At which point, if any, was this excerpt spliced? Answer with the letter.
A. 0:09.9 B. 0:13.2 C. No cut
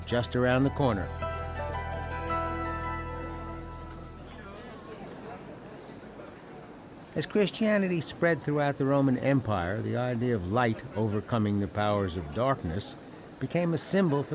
A